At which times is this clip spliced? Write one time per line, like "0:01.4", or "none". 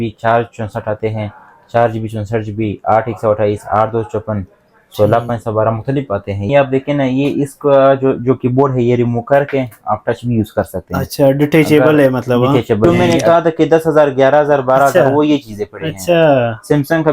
0:06.5
0:12.8